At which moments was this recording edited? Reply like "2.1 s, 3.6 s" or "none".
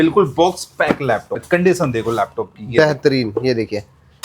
1.4 s